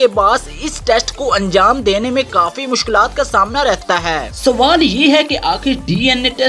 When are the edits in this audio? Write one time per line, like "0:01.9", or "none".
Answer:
0:04.3